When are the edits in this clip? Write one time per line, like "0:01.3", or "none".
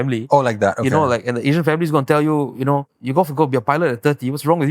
0:03.0